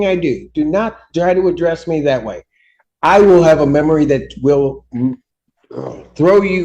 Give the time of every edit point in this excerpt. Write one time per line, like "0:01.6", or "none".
none

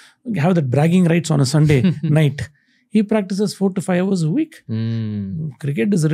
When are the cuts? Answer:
none

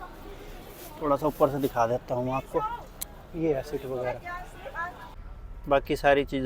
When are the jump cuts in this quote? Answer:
0:05.2

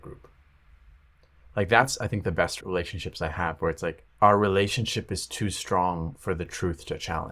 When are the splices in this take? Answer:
0:02.6
0:04.1

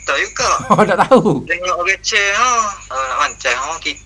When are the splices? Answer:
0:01.5
0:02.8

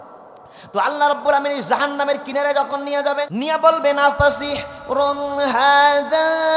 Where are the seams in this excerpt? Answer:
0:03.3

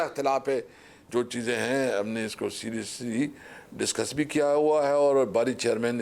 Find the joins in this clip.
0:01.0

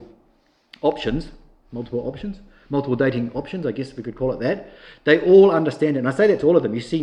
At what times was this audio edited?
none

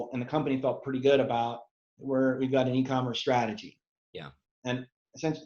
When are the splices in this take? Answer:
none

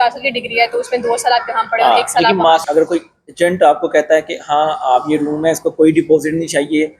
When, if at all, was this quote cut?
0:02.6

